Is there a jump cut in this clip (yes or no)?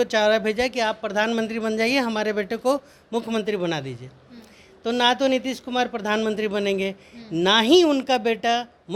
no